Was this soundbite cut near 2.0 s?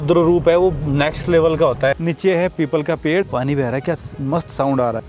yes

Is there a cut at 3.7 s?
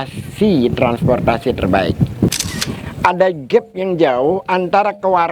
no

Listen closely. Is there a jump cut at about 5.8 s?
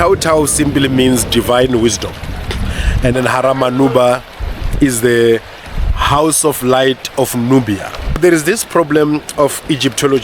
no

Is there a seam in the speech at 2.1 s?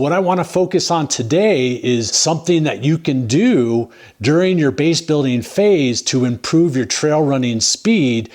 yes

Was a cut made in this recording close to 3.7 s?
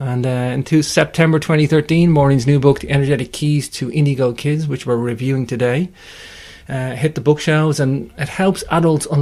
yes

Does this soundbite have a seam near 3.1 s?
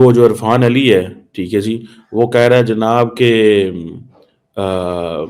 no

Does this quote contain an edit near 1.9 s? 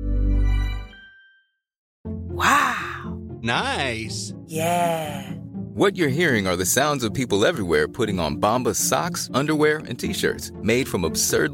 yes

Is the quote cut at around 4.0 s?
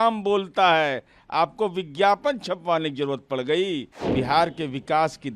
yes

